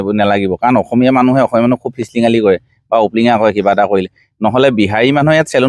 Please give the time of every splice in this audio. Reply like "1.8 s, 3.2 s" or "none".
none